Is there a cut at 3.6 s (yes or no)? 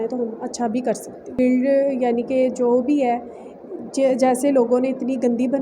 no